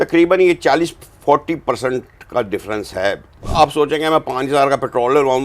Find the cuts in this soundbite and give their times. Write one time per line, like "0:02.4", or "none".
0:03.5